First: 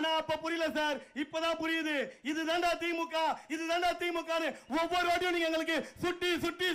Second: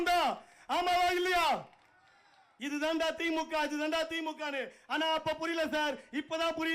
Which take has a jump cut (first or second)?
second